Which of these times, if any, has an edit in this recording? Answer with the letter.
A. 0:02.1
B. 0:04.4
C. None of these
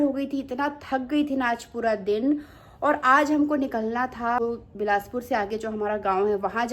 B